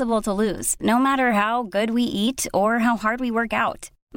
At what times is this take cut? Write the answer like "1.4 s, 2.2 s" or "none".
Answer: none